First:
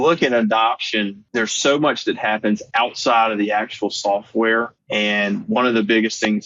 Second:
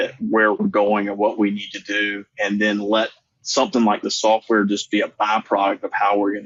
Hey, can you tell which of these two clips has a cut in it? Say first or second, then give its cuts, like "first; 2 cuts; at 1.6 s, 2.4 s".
first; 2 cuts; at 1.2 s, 4.8 s